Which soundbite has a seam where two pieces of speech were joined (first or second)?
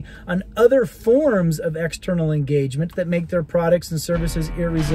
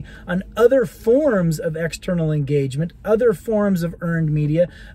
first